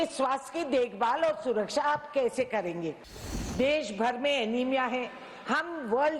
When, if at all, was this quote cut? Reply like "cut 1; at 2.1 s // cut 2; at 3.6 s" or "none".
cut 1; at 3.3 s